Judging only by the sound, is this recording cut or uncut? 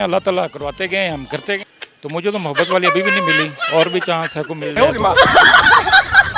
cut